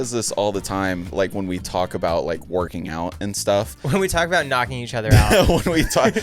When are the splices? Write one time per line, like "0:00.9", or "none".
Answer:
0:01.1